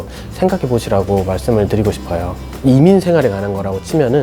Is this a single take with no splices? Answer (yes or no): no